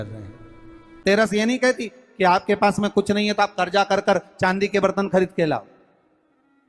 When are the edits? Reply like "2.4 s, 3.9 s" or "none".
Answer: 1.0 s